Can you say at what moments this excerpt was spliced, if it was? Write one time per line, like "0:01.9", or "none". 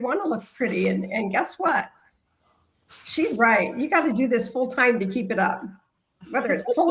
none